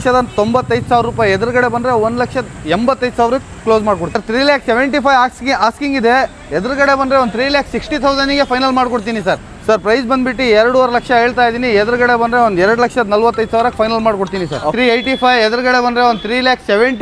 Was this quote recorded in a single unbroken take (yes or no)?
no